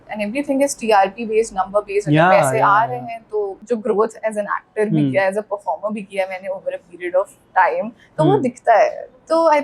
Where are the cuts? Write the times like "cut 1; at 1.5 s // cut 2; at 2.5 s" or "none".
cut 1; at 3.6 s